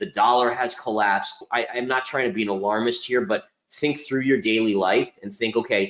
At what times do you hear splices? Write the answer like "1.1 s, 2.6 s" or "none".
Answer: 1.5 s